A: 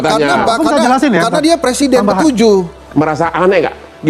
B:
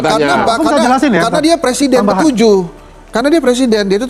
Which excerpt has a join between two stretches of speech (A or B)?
A